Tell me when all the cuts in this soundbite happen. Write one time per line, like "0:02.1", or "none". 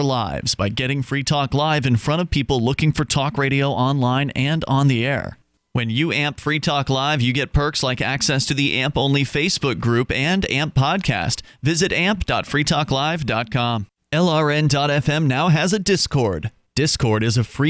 0:14.0